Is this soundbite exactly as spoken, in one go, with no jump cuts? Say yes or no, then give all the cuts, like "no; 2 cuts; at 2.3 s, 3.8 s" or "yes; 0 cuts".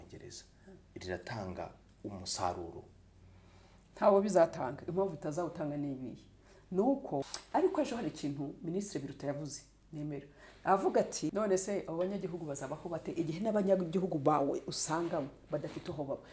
no; 2 cuts; at 7.4 s, 11.3 s